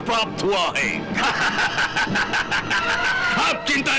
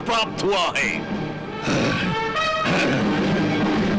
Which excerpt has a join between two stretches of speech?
first; 1 cut; at 1.1 s

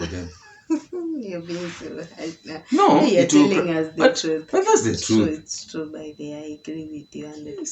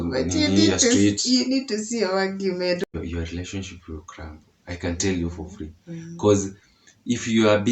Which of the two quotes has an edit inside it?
second; 1 cut; at 2.8 s

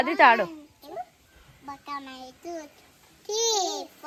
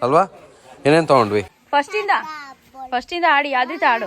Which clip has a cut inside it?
second; 1 cut; at 1.6 s

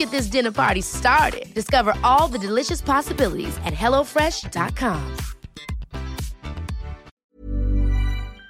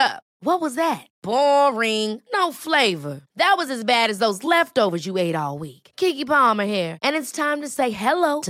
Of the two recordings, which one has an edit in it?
first; 1 cut; at 7.2 s

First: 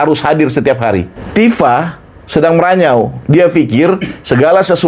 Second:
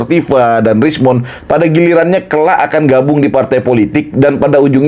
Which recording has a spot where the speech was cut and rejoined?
first; 1 cut; at 1.2 s

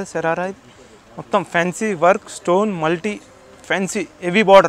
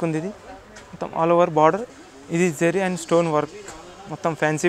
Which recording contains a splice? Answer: second; 1 cut; at 1.9 s

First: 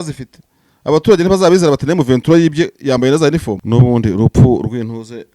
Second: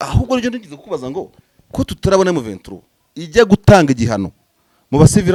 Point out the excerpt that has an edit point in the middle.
first; 1 cut; at 3.6 s

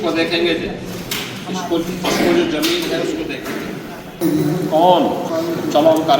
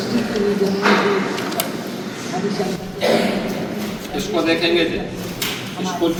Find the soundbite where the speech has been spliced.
first; 2 cuts; at 4.2 s, 5.3 s

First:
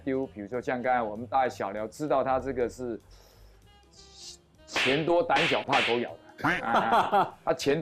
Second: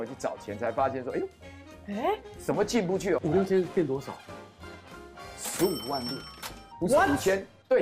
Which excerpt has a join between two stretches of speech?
second; 1 cut; at 3.2 s

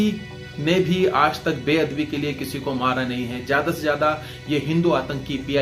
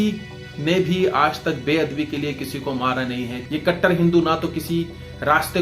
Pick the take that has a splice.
second; 1 cut; at 3.4 s

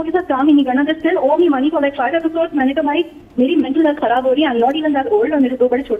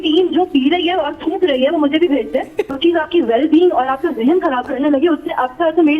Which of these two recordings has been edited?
second; 1 cut; at 2.7 s

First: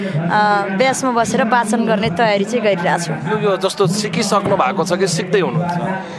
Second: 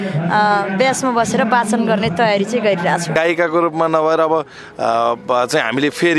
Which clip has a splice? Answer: second; 1 cut; at 3.1 s

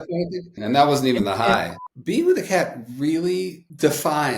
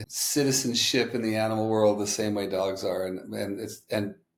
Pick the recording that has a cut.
first; 1 cut; at 1.8 s

